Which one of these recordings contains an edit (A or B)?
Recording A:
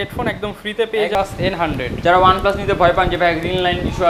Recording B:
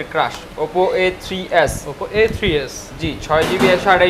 A